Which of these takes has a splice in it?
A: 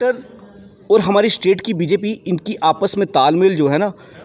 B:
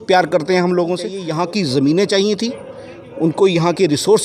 B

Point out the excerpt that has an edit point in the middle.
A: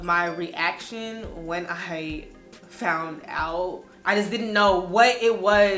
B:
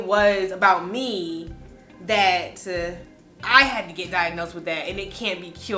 A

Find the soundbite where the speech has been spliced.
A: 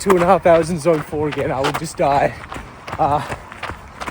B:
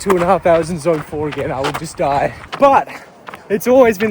B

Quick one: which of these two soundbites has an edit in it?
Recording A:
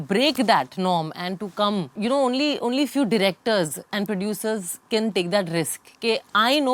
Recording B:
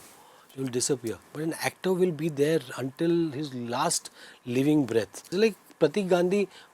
B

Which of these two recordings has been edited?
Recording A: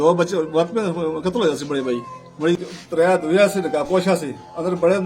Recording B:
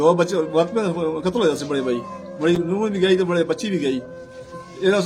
A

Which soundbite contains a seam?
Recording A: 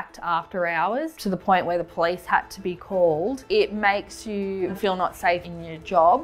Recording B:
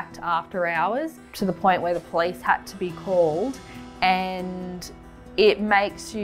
A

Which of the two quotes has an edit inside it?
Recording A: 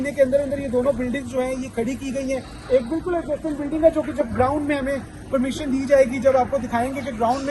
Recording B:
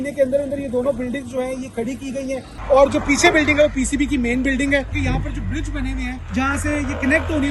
B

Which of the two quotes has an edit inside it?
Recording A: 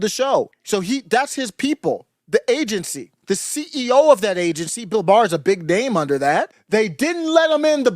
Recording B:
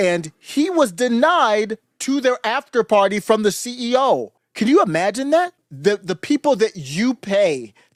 A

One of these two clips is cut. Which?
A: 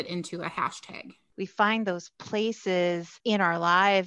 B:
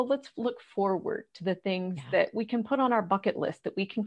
A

